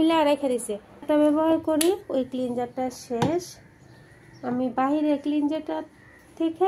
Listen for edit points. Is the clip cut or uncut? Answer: cut